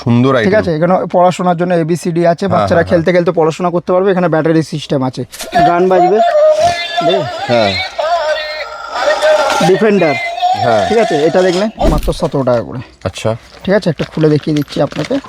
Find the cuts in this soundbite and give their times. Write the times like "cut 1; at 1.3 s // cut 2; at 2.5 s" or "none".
cut 1; at 5.4 s // cut 2; at 11.9 s